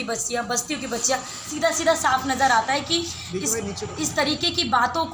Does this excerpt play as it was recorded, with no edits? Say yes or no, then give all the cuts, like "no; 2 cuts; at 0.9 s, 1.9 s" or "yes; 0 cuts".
no; 1 cut; at 1.5 s